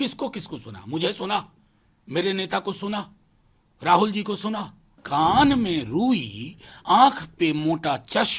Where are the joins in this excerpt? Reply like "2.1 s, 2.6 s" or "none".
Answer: 5.0 s